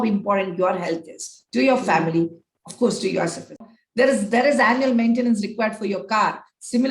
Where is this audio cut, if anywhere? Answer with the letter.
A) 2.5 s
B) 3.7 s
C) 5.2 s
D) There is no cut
B